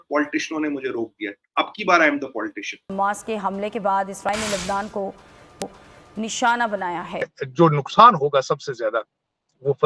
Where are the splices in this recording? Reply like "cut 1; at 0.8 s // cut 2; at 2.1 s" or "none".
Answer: cut 1; at 2.9 s // cut 2; at 7.4 s